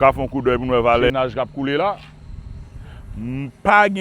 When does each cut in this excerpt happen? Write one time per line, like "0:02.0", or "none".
0:01.1